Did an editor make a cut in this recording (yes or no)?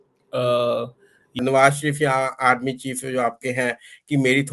yes